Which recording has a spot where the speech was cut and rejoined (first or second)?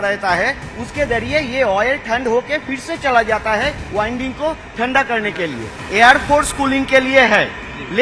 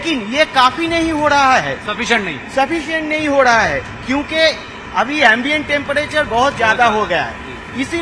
first